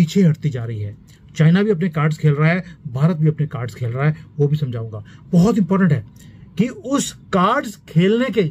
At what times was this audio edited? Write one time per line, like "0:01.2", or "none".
none